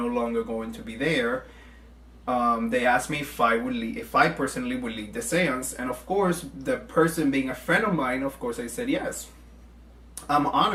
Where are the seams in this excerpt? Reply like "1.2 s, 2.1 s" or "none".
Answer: none

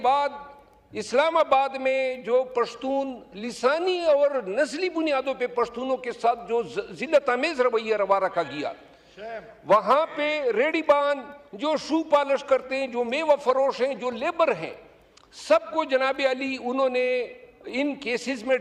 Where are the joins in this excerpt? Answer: none

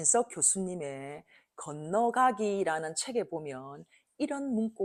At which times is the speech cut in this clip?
none

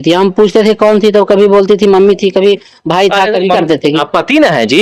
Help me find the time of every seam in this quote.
3.6 s

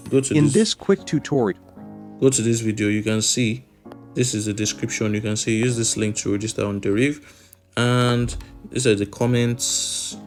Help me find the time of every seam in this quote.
none

